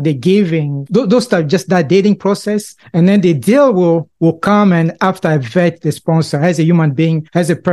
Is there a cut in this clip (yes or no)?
no